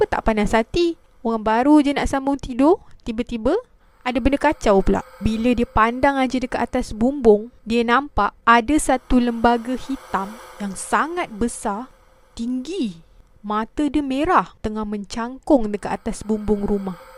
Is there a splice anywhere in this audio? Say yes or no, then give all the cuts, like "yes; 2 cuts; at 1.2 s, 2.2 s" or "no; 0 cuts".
no; 0 cuts